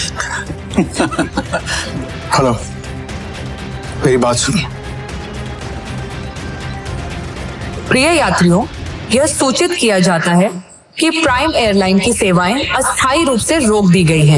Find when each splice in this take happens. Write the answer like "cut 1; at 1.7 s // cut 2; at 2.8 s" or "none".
cut 1; at 1.8 s // cut 2; at 5.6 s